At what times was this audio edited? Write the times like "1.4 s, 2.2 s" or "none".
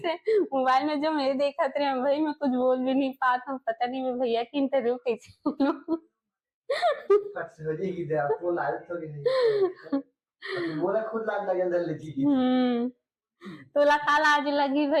none